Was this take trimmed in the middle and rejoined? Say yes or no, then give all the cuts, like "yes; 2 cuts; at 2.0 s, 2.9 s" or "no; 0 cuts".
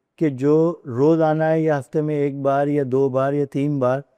no; 0 cuts